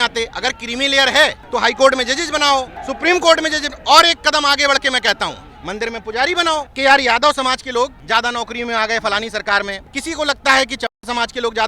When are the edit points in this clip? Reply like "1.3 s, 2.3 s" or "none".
1.4 s, 2.8 s, 6.7 s, 8.0 s, 9.9 s